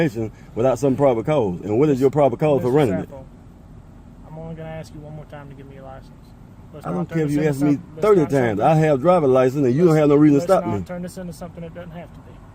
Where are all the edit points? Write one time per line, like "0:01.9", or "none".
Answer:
none